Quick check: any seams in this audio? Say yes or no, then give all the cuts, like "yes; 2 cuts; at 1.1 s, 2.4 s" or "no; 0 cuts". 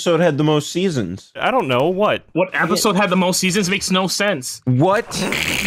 yes; 1 cut; at 1.4 s